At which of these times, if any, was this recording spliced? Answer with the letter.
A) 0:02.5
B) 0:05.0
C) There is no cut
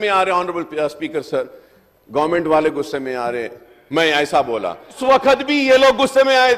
B